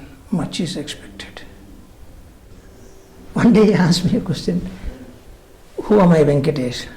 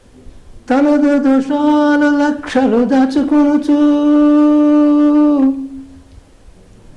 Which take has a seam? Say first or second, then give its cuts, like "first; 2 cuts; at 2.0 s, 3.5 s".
first; 1 cut; at 2.6 s